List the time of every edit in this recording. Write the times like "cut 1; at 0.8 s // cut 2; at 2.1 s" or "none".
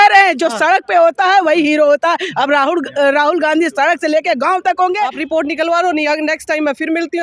cut 1; at 5.2 s